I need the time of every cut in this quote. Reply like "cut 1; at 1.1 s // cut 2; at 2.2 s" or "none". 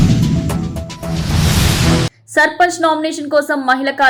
none